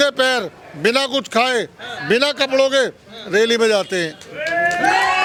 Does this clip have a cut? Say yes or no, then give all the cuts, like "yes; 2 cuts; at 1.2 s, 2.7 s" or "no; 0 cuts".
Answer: no; 0 cuts